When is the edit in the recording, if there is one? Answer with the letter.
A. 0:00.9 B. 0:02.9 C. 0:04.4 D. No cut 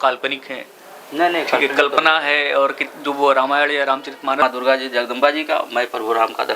C